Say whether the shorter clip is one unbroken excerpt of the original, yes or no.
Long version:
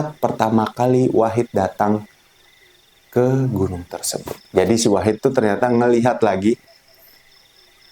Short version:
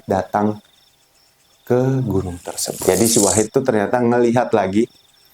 no